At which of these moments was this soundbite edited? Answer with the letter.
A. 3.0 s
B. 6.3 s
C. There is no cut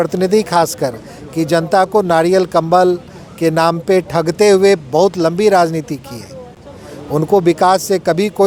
C